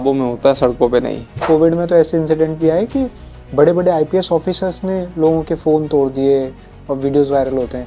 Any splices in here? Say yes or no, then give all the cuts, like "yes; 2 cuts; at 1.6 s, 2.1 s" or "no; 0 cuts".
yes; 1 cut; at 1.4 s